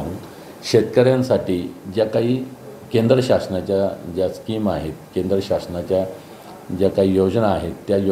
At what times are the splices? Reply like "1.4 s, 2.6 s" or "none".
none